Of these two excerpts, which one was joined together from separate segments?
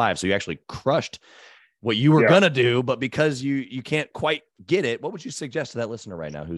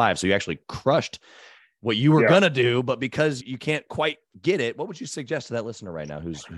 second; 1 cut; at 3.4 s

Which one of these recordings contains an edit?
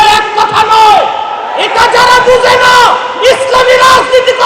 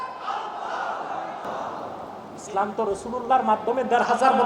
second; 1 cut; at 1.5 s

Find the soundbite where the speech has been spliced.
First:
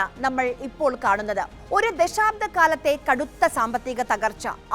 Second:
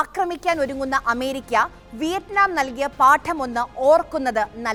first; 1 cut; at 1.6 s

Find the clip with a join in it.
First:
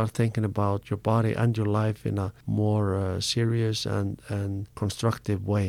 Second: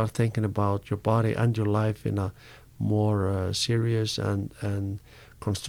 first; 2 cuts; at 2.4 s, 4.7 s

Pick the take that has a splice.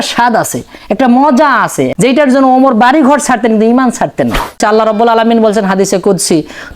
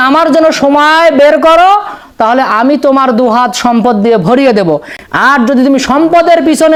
first; 2 cuts; at 1.9 s, 4.6 s

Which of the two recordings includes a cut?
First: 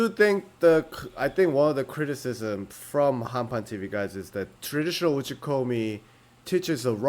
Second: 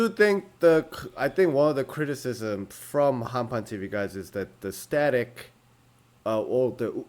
first; 1 cut; at 4.6 s

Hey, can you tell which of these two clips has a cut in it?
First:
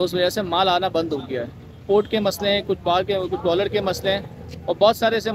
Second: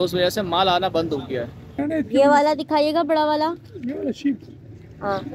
second; 1 cut; at 1.8 s

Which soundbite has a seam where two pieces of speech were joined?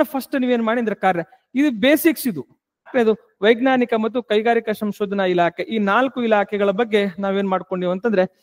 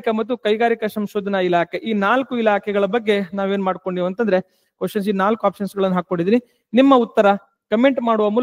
first; 1 cut; at 2.9 s

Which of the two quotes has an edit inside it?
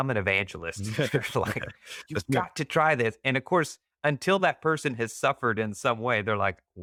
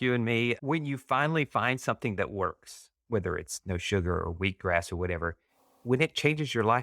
second; 1 cut; at 5.8 s

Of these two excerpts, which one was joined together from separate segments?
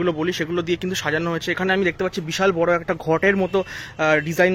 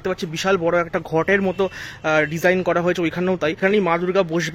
second; 1 cut; at 3.6 s

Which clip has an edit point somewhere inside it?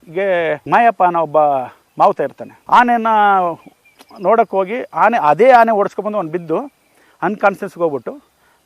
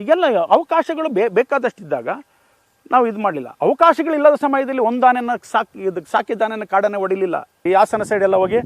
second; 1 cut; at 7.6 s

